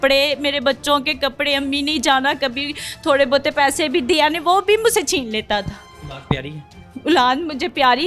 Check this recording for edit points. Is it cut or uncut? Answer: uncut